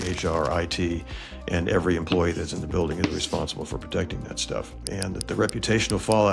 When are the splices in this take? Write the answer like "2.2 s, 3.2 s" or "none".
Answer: 4.8 s